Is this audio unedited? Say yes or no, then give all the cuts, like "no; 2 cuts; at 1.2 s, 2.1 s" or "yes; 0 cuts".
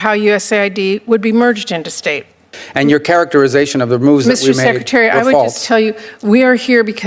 no; 1 cut; at 2.6 s